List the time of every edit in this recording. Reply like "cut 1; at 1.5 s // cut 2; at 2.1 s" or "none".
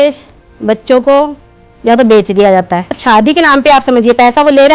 cut 1; at 3.0 s